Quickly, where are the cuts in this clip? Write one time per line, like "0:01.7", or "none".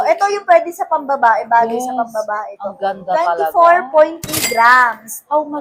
none

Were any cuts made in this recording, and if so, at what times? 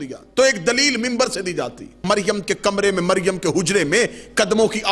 0:02.0

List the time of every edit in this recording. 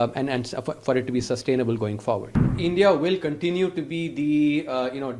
0:02.6

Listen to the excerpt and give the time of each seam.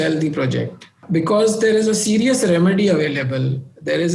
0:01.0

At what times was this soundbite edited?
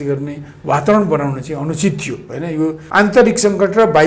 0:02.8

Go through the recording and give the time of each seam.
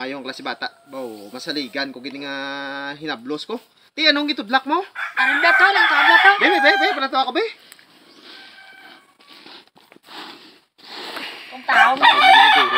none

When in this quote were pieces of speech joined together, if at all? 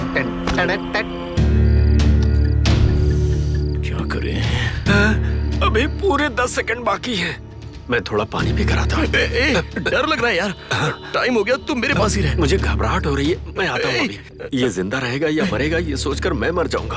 0:01.4

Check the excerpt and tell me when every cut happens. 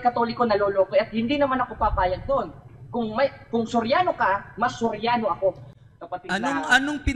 none

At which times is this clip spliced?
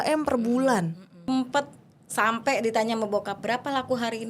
0:01.3

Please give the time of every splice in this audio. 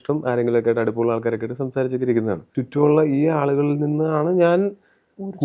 0:02.6

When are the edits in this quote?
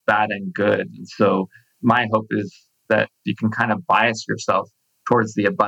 0:03.2

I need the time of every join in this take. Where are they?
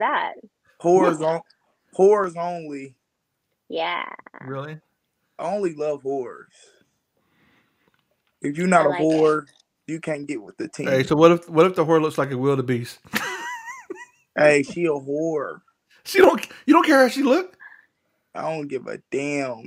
none

